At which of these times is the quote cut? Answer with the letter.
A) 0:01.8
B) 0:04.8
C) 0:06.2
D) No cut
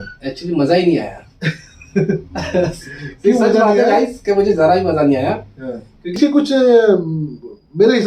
C